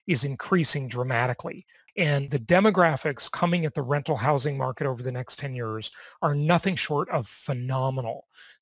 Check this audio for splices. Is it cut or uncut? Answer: cut